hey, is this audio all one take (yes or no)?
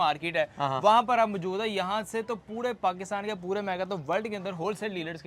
yes